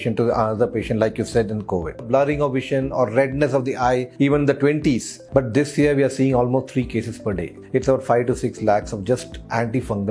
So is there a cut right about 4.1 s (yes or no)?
yes